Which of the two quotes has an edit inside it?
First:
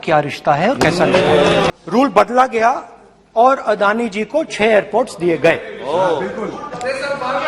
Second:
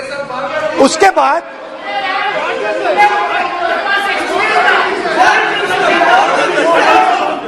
first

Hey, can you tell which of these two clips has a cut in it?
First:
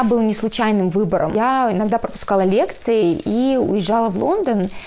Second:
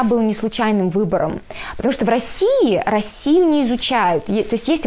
first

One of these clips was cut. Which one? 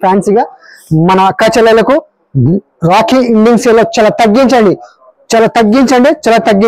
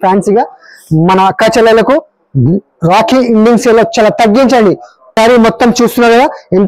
second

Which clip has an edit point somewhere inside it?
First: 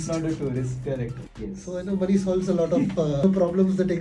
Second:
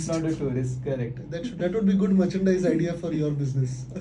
first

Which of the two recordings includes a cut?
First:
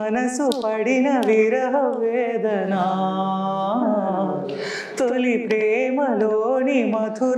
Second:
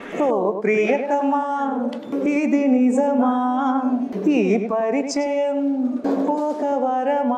second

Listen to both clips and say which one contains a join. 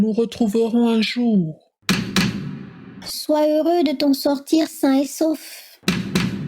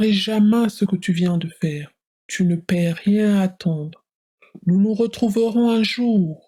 first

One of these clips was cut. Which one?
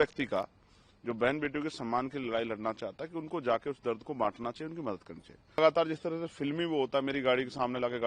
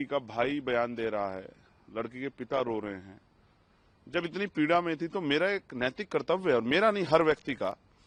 first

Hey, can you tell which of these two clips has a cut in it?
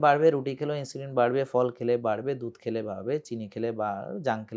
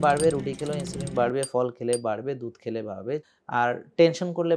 second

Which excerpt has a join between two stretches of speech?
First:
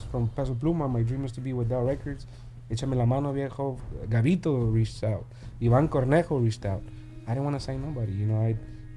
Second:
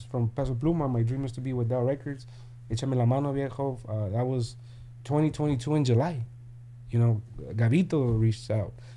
first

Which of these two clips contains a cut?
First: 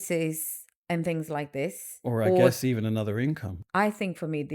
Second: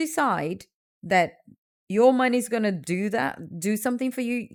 first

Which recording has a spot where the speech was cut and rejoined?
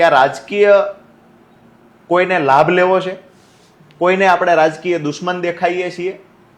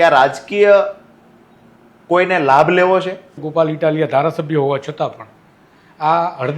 second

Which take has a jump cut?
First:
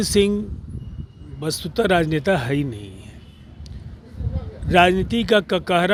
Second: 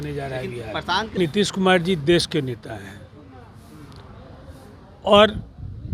second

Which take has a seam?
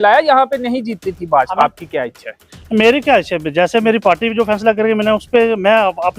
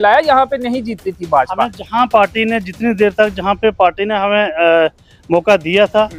first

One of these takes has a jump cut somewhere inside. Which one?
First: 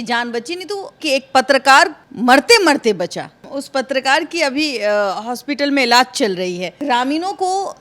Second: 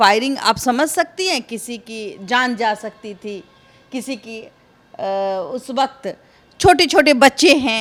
first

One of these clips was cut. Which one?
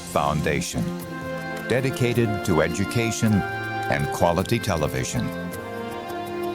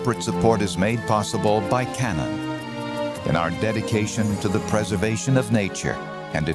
first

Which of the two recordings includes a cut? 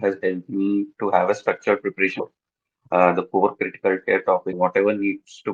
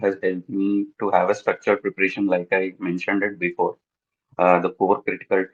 first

